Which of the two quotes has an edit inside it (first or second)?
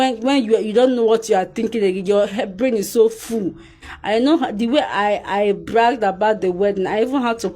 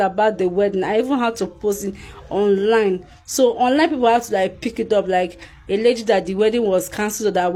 first